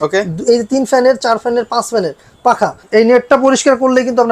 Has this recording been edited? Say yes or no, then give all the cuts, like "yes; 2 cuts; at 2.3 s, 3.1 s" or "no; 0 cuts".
yes; 1 cut; at 2.8 s